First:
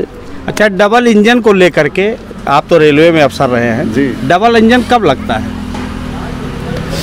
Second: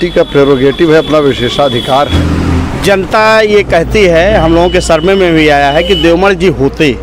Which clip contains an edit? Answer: second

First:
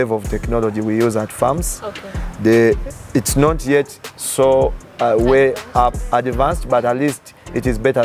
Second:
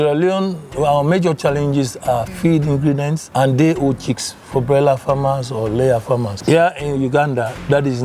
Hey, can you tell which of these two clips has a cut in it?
second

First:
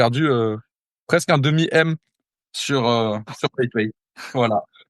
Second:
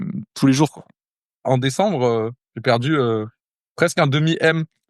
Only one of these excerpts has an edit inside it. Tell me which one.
second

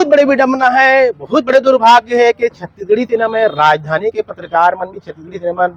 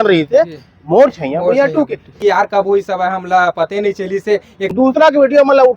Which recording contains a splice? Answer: second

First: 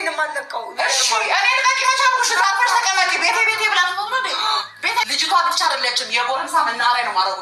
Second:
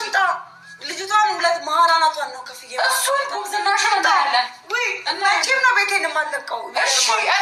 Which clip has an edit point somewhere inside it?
first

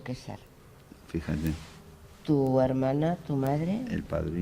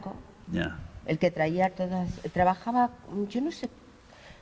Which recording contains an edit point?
first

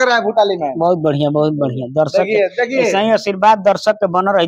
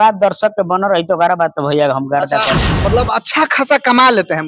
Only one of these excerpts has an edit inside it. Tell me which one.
second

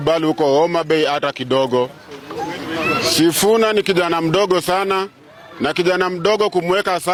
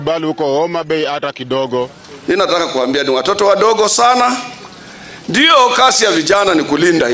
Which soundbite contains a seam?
second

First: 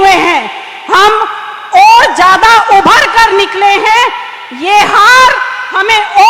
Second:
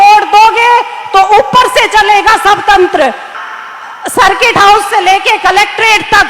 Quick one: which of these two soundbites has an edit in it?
second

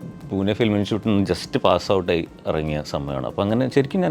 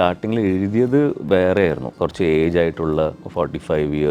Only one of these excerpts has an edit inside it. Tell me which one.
second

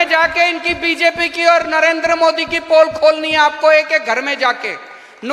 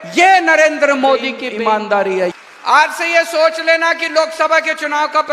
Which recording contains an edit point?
second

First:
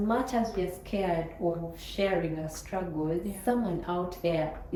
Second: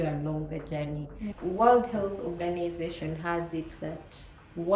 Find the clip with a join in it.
second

